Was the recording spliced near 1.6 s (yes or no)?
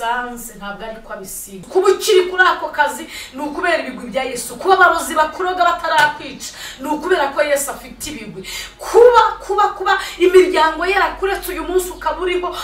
yes